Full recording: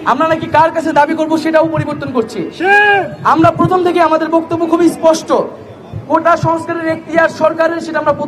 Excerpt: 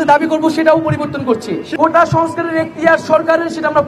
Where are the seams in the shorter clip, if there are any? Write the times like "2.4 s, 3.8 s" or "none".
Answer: 1.6 s